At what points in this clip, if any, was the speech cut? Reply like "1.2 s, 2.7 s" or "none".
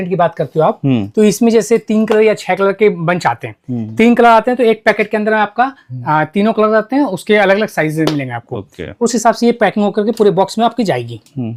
none

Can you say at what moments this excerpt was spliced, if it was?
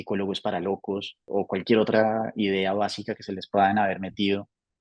1.2 s

